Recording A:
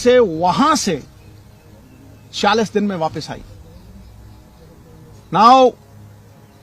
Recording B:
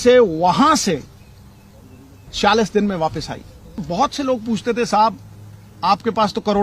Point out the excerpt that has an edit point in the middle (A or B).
B